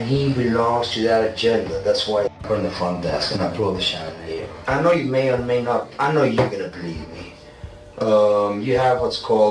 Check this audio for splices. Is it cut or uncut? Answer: cut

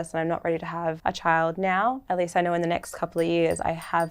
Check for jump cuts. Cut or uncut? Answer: cut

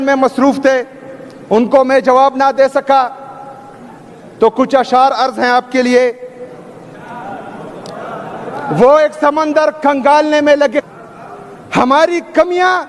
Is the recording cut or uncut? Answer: uncut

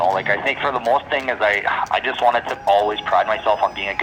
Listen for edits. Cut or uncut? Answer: uncut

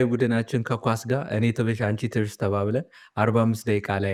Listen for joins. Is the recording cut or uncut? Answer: uncut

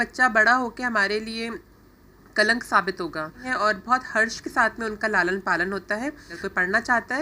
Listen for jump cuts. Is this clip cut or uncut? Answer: cut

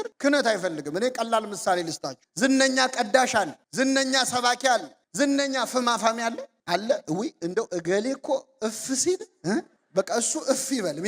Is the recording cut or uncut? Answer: cut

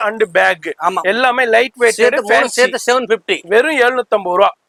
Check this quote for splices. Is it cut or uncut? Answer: uncut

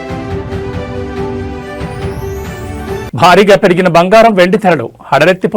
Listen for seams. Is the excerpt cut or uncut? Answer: uncut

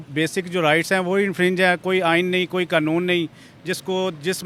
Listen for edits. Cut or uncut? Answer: uncut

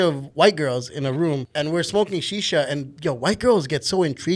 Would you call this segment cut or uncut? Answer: cut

